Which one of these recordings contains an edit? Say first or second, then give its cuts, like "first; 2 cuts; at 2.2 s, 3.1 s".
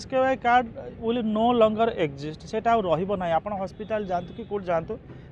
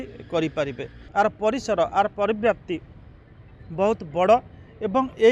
second; 1 cut; at 1.0 s